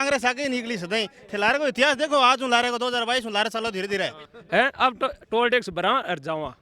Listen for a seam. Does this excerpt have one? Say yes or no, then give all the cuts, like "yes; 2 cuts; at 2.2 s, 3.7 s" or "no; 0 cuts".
yes; 1 cut; at 4.3 s